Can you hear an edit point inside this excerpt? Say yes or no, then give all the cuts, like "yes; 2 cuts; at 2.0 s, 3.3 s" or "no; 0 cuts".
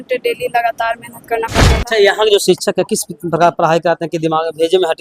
yes; 1 cut; at 1.6 s